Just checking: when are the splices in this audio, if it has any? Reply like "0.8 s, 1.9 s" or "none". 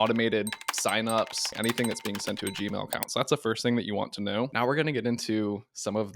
1.5 s, 4.5 s